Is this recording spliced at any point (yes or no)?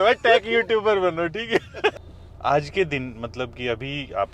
yes